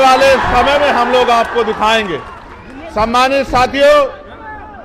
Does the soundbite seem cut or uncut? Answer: uncut